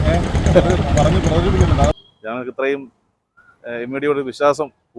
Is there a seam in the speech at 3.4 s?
no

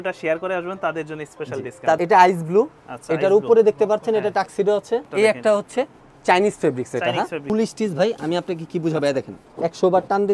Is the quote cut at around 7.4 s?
yes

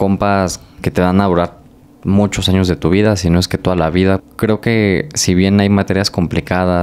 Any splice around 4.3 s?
yes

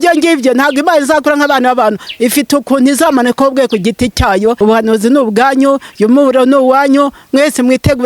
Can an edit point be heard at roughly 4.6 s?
yes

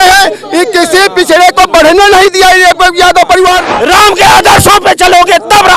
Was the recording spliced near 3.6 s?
yes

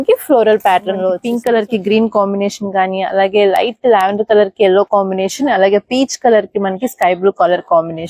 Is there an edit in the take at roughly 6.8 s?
no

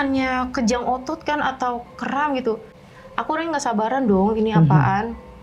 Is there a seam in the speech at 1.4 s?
no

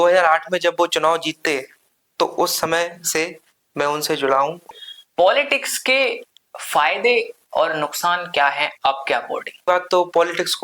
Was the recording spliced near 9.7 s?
yes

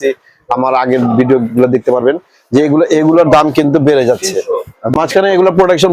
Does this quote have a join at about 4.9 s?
yes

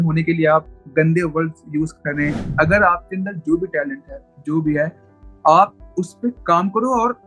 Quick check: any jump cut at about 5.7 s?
no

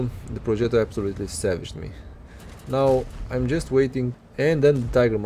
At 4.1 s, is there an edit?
yes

